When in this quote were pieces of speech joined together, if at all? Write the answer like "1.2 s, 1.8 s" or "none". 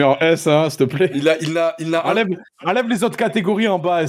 none

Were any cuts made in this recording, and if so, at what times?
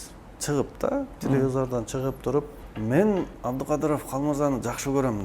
2.6 s, 3.3 s

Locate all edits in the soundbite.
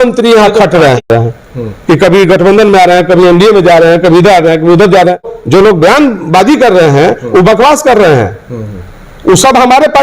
1.1 s, 5.4 s

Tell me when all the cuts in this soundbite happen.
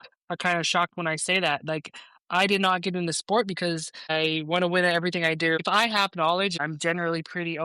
4.1 s, 5.6 s, 6.6 s

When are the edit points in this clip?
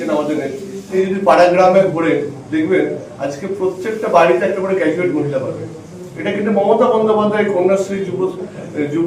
0.9 s

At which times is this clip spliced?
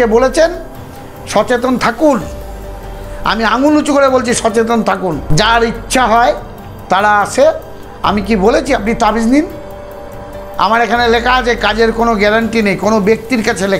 none

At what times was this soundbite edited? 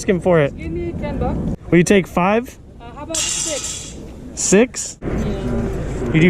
1.5 s, 4.9 s

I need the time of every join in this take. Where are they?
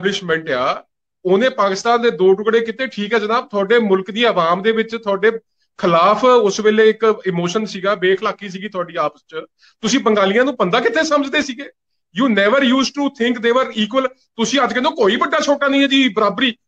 none

